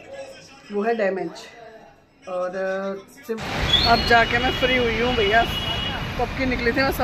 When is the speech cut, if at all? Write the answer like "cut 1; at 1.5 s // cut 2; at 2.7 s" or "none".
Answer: cut 1; at 3.4 s